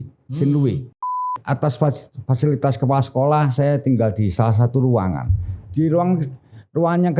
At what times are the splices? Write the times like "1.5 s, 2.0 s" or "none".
1.0 s